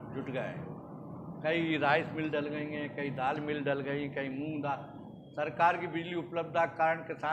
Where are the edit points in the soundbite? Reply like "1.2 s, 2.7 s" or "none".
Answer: none